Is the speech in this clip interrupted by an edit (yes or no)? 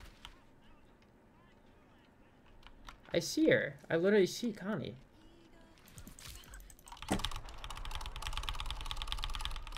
yes